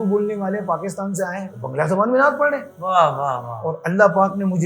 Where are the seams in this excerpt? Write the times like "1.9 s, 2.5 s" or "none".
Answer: 1.5 s, 2.7 s